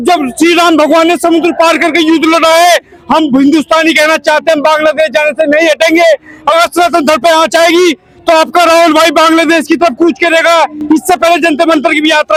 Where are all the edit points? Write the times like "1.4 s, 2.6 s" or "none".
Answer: none

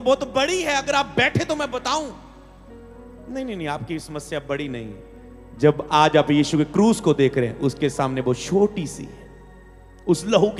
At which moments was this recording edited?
none

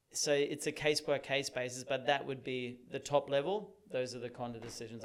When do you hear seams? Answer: none

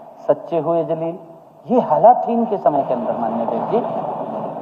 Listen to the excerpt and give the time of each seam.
none

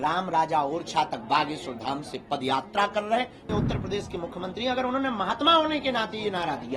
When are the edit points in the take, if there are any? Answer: 3.4 s

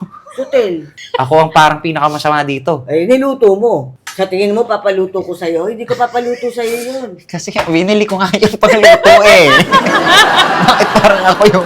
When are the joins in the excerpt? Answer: 1.0 s, 4.0 s

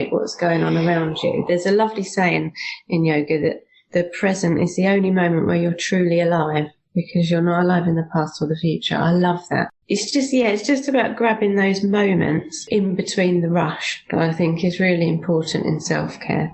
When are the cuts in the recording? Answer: 9.8 s, 12.5 s

